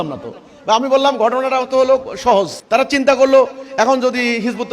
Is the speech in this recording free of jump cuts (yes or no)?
no